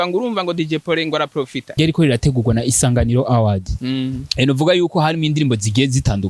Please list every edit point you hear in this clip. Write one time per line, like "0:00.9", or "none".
0:01.7